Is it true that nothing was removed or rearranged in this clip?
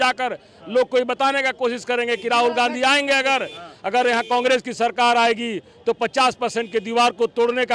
yes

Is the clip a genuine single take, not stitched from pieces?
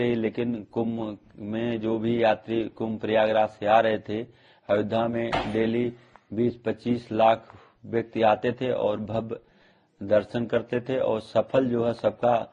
yes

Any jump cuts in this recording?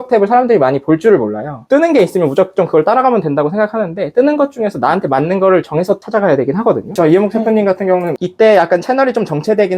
yes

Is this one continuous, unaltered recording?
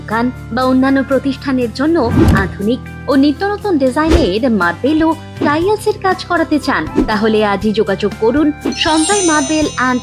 yes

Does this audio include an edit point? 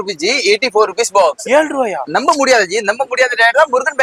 no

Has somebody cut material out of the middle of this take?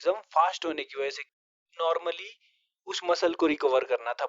no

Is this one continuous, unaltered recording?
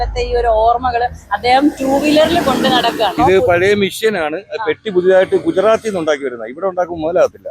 no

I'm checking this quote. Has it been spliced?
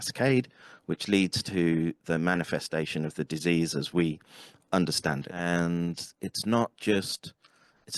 yes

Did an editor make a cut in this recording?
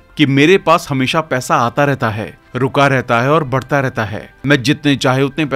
no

